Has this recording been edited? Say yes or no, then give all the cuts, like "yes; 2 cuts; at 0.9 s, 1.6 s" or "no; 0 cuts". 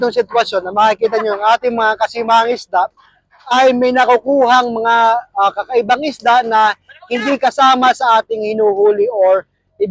no; 0 cuts